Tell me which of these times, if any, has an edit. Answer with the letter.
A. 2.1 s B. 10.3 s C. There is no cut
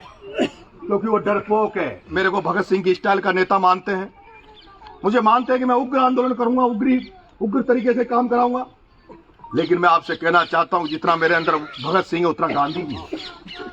A